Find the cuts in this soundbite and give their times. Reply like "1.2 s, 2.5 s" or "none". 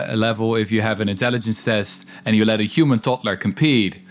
none